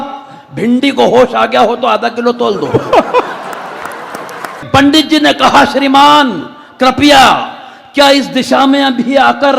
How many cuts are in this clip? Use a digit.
1